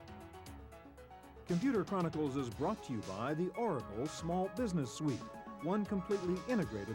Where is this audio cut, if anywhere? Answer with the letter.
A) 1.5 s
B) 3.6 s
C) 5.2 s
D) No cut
A